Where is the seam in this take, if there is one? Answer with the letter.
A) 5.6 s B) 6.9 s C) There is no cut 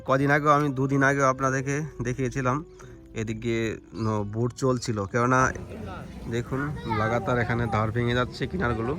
A